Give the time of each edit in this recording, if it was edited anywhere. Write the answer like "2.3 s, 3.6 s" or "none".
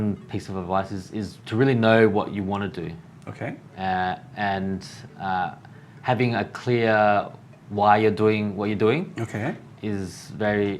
none